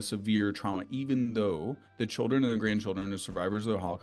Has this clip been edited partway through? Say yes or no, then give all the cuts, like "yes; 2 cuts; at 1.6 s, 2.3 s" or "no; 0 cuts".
no; 0 cuts